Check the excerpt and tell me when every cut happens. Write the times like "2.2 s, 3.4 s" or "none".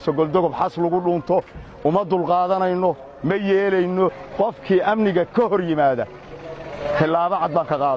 4.2 s